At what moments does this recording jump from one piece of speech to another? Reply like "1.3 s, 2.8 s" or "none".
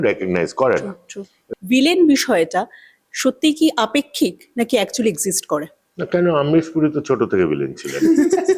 1.4 s